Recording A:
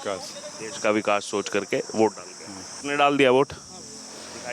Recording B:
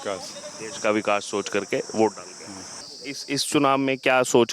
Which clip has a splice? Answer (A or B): B